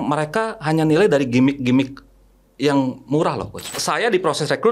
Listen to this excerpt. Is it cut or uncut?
cut